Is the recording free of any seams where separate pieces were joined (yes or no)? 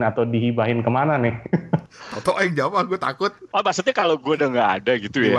no